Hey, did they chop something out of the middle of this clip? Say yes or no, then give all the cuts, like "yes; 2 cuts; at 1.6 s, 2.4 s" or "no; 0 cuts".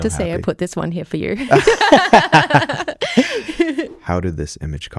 yes; 1 cut; at 3.9 s